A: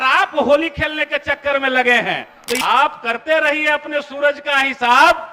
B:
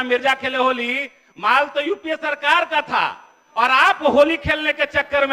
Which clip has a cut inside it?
A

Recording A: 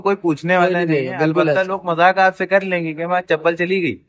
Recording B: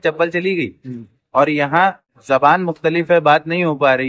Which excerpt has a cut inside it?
B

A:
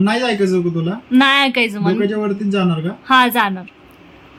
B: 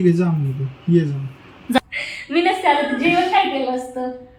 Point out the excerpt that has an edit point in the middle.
B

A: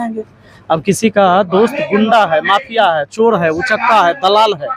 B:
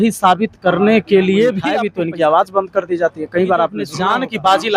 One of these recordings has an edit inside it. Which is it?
B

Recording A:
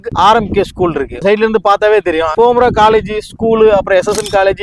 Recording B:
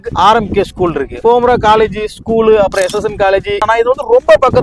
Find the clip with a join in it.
B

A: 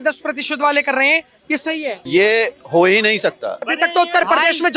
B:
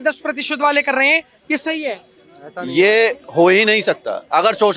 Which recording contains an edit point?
A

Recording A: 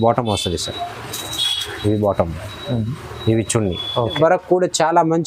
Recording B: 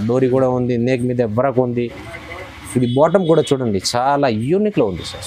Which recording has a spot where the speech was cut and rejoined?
A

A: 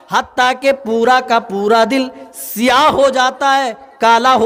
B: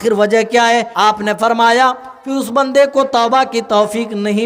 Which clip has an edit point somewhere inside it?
B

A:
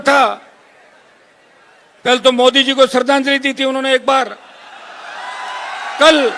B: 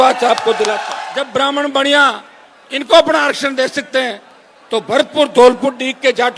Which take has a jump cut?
B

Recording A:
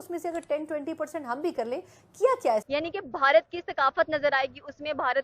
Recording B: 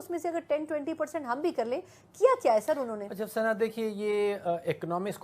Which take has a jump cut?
A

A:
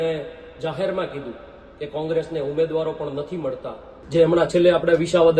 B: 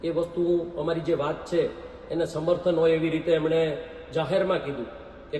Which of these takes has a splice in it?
A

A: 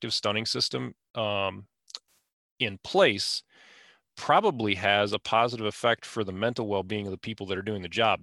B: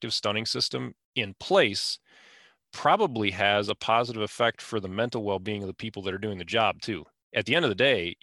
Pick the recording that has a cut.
B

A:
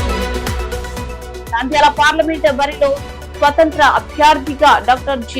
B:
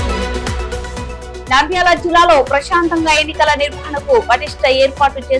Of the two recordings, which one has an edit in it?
A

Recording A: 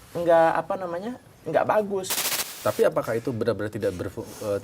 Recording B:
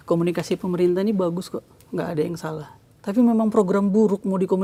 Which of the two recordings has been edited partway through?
A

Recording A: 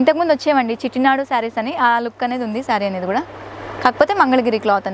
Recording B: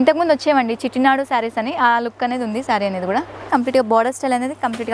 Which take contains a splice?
B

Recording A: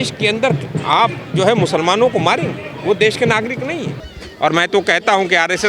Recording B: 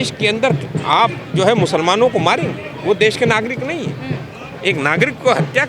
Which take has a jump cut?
A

